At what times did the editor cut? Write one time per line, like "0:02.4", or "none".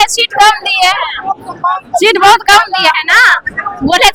none